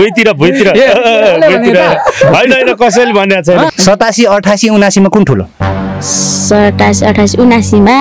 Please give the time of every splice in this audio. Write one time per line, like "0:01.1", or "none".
0:03.7